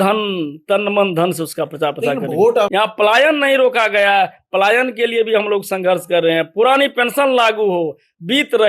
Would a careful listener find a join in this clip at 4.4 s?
no; 1 cut; at 2.7 s

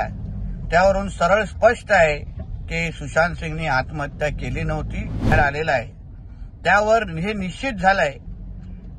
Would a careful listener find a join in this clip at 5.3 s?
yes; 1 cut; at 5.3 s

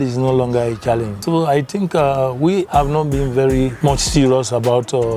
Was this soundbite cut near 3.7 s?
yes; 3 cuts; at 1.1 s, 2.7 s, 3.7 s

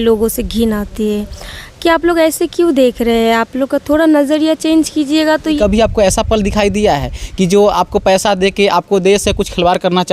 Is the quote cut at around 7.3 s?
no; 1 cut; at 5.6 s

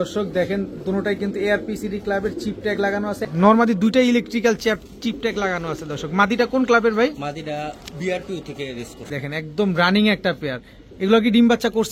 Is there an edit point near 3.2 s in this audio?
yes; 2 cuts; at 3.2 s, 9.0 s

